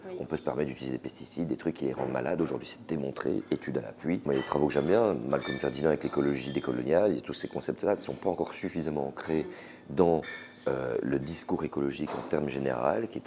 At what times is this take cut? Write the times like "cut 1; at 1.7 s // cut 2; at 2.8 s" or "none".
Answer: none